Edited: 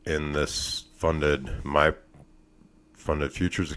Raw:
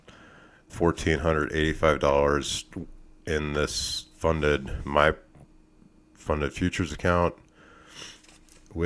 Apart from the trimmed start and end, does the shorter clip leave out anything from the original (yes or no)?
no